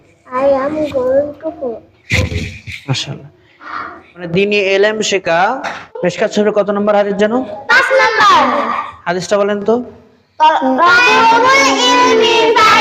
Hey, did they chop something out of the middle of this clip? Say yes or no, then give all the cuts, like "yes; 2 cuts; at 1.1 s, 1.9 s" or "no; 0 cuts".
yes; 1 cut; at 3.7 s